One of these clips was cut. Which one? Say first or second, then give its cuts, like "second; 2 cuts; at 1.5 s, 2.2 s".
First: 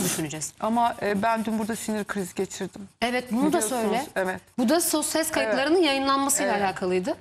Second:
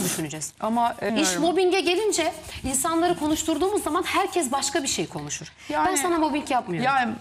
second; 1 cut; at 1.1 s